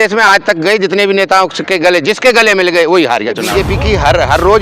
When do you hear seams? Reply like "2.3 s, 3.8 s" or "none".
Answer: 3.4 s